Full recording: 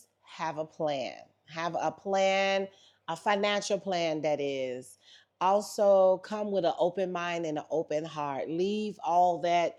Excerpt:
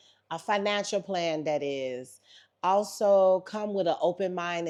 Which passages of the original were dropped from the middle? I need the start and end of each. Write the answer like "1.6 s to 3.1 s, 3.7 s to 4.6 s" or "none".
none

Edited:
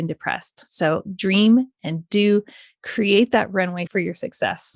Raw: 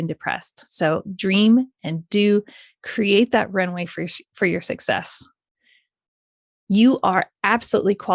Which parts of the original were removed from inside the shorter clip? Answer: 3.9 s to 4.3 s

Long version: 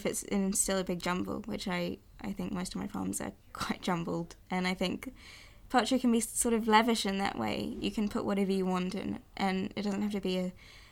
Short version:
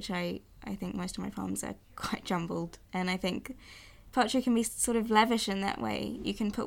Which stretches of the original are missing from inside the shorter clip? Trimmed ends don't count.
none

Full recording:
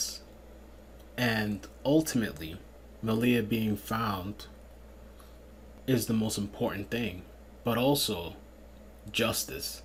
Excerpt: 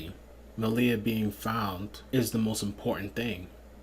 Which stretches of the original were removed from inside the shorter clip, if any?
4.4 s to 5.7 s

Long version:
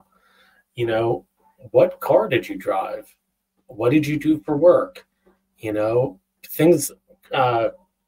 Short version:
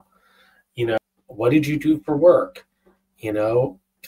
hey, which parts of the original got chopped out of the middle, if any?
1.0 s to 3.4 s

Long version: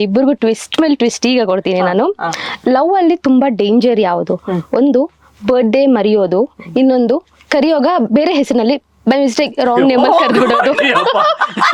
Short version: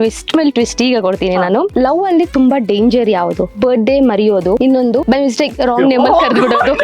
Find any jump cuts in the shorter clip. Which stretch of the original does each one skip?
2.1 s to 2.6 s, 4.4 s to 5.3 s, 6.7 s to 8.8 s

